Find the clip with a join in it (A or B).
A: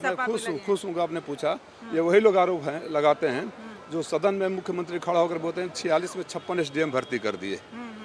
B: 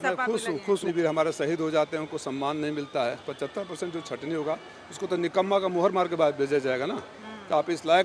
B